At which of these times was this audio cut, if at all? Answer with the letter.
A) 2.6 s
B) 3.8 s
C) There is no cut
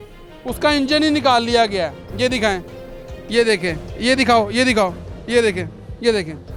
C